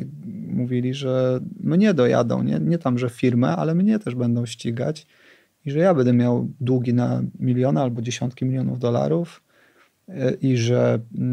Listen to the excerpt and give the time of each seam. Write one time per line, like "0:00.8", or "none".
none